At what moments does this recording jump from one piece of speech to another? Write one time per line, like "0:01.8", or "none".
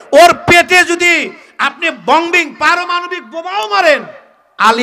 none